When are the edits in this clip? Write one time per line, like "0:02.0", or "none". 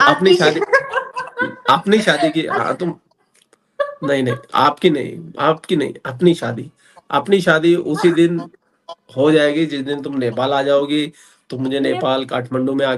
none